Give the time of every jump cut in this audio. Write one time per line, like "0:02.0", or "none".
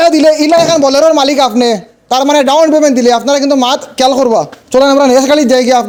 none